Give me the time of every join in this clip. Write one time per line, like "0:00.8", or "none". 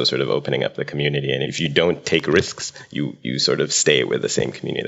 0:01.5